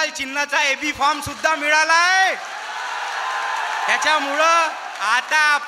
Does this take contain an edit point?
no; 0 cuts

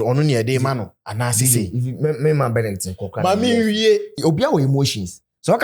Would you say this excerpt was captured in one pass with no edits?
no; 1 cut; at 4.1 s

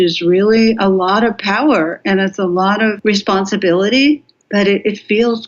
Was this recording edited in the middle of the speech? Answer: yes; 2 cuts; at 3.0 s, 4.3 s

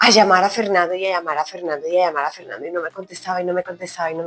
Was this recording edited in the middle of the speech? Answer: no; 0 cuts

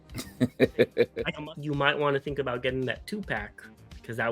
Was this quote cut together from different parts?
yes; 1 cut; at 1.2 s

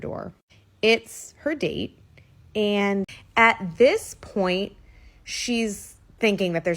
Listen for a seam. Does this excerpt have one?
yes; 1 cut; at 3.2 s

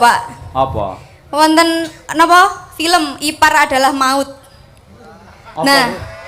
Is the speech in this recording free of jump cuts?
yes; 0 cuts

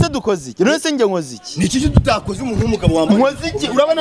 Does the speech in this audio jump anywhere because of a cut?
no; 0 cuts

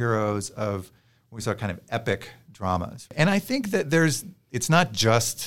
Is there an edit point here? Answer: yes; 1 cut; at 3.1 s

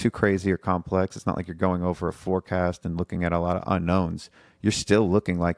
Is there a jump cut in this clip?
no; 0 cuts

